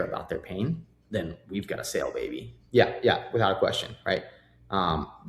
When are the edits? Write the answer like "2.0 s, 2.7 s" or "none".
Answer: 2.5 s